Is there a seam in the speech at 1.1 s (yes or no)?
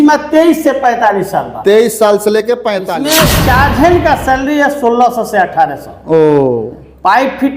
no